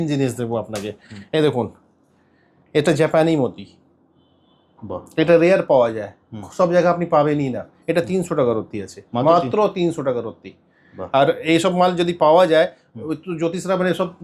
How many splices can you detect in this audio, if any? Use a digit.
0